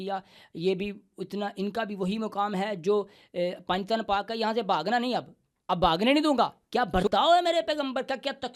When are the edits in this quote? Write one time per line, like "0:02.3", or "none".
0:06.6